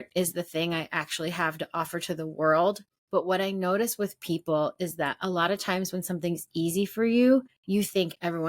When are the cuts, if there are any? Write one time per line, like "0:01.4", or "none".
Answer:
0:02.9
0:07.6